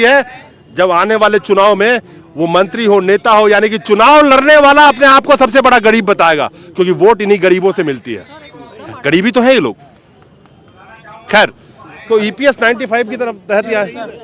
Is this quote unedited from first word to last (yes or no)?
yes